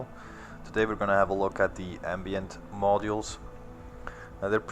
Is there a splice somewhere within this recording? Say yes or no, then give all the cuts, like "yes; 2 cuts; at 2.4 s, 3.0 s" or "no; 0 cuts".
yes; 1 cut; at 1.8 s